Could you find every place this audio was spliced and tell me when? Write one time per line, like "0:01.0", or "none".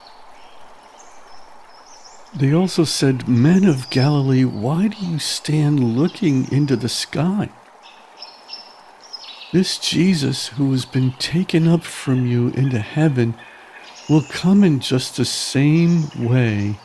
none